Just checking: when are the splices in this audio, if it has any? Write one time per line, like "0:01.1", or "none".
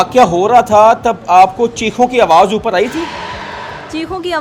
none